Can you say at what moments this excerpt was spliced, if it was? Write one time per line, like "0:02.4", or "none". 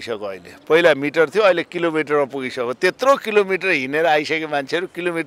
none